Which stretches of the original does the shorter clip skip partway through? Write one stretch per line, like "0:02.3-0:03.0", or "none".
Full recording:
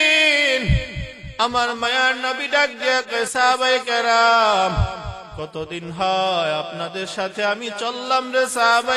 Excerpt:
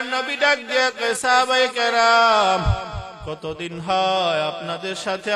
none